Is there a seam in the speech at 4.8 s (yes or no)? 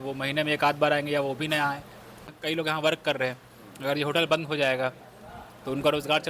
no